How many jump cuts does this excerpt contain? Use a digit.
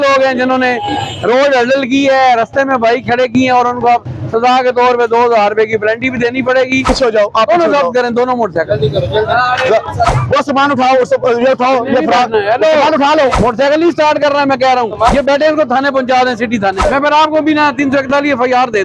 5